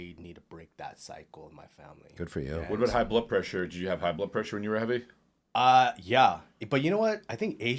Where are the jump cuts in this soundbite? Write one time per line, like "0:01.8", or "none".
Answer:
none